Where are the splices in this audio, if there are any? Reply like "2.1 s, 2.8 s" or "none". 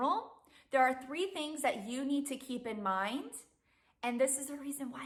none